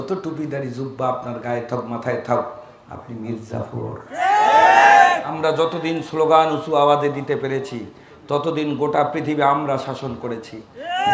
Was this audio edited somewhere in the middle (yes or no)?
yes